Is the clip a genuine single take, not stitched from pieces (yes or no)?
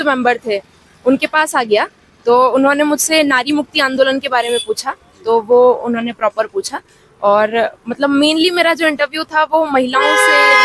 yes